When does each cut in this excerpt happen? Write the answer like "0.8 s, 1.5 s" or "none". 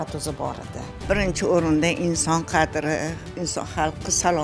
1.0 s, 3.2 s